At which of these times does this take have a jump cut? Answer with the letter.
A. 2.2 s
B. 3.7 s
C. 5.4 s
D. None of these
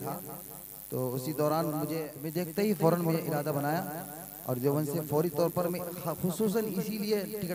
A